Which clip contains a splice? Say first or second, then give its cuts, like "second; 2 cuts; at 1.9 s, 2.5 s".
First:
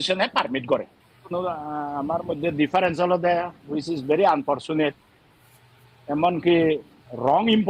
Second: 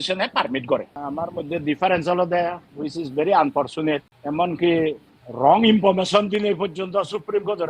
second; 2 cuts; at 1.0 s, 4.1 s